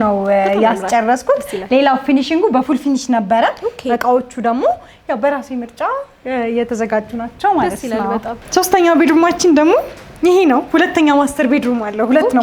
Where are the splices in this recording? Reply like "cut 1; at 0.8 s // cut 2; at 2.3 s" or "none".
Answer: cut 1; at 8.4 s

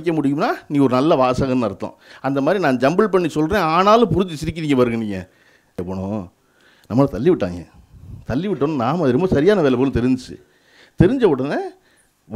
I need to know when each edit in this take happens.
cut 1; at 5.8 s

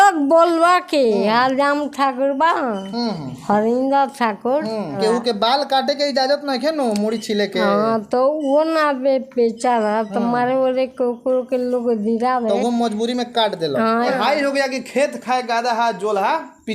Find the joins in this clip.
cut 1; at 5.0 s // cut 2; at 14.1 s

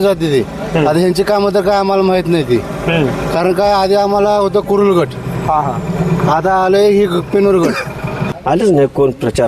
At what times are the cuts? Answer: cut 1; at 8.3 s

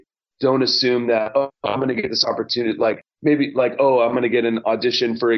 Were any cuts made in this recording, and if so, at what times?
none

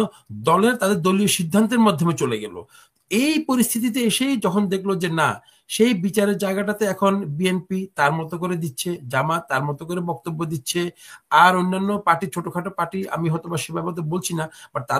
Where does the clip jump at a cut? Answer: none

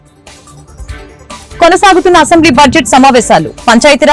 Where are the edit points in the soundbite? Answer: cut 1; at 1.3 s

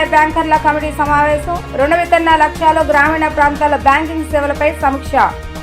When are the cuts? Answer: none

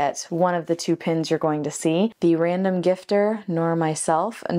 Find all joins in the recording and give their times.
cut 1; at 2.1 s

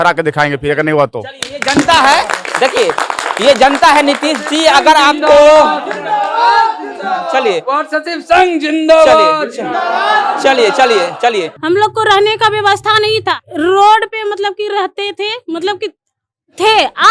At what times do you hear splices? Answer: cut 1; at 11.5 s

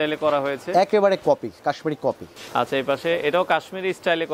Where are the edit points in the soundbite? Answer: cut 1; at 2.3 s

